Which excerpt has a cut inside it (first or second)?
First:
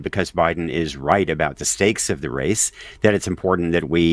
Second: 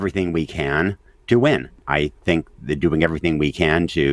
second